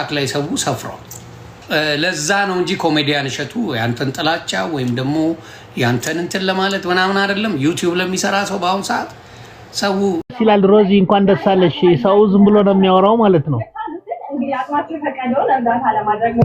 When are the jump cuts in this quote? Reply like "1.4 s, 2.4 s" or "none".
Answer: 1.6 s, 10.2 s